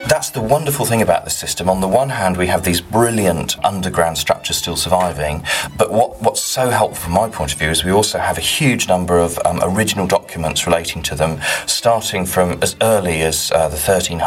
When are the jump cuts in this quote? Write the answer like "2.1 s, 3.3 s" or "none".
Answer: 3.6 s, 5.6 s